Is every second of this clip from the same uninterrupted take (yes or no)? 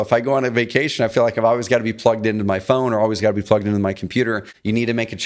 yes